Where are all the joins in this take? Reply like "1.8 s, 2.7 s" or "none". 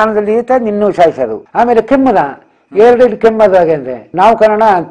1.4 s

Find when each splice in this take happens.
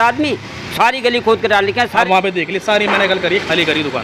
2.0 s

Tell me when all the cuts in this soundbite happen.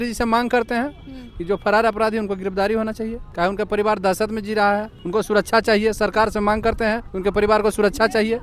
3.2 s, 5.0 s, 7.1 s

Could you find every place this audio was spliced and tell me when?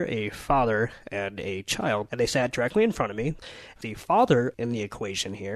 2.1 s, 3.6 s, 4.5 s

